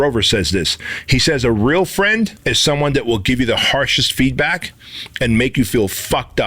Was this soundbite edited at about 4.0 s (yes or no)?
no